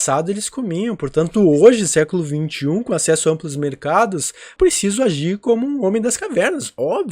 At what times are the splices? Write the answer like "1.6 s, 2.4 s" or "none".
4.5 s